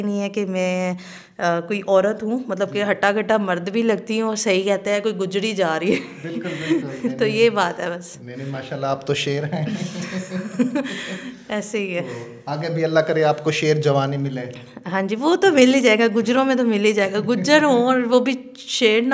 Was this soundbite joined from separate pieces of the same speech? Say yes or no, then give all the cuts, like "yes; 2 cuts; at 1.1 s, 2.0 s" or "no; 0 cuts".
no; 0 cuts